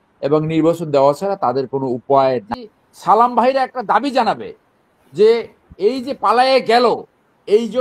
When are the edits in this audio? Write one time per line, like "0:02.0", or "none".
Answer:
0:02.5